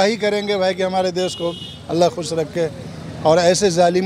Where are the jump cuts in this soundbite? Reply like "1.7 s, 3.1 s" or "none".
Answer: none